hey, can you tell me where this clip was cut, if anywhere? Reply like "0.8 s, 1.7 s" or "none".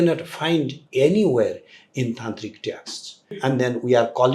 3.3 s